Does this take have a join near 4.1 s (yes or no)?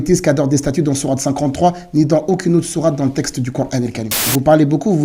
yes